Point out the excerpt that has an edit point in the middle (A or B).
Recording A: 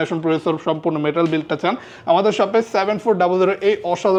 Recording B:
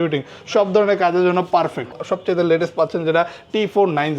B